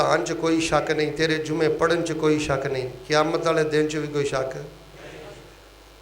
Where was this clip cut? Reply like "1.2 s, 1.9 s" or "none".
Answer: none